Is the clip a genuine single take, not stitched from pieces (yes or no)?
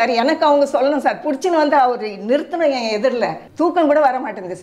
no